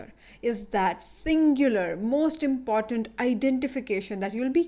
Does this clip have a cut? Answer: no; 0 cuts

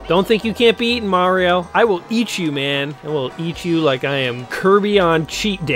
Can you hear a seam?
yes; 2 cuts; at 3.0 s, 4.5 s

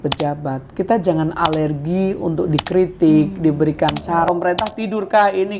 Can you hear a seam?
yes; 1 cut; at 4.3 s

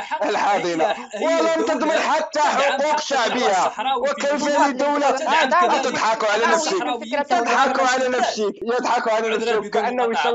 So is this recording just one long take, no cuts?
no; 1 cut; at 8.6 s

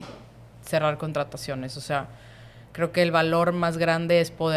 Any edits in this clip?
no; 0 cuts

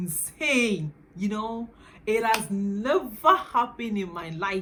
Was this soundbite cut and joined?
no; 0 cuts

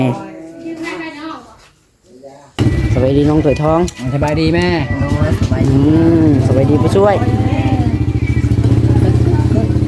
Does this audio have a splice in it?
yes; 1 cut; at 2.6 s

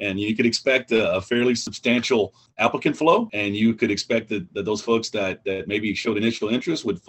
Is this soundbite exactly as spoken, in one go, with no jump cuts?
no; 2 cuts; at 2.3 s, 3.3 s

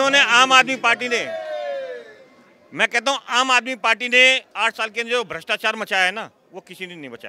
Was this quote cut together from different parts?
no; 0 cuts

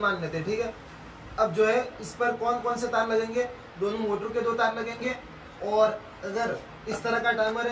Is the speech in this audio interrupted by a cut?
no; 0 cuts

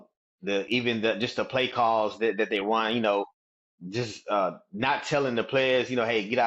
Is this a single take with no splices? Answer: yes; 0 cuts

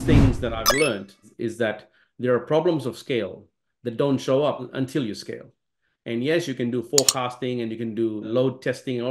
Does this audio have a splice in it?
yes; 2 cuts; at 4.7 s, 8.3 s

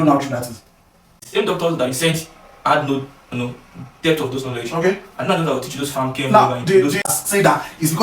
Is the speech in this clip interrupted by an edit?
yes; 2 cuts; at 1.2 s, 7.1 s

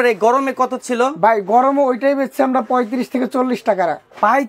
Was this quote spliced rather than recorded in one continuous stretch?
no; 0 cuts

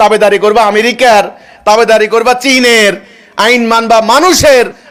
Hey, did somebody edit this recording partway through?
no; 0 cuts

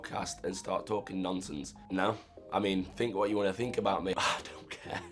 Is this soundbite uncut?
no; 2 cuts; at 1.7 s, 4.1 s

